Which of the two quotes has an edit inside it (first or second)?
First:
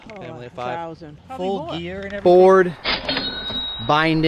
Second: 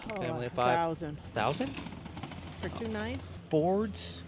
first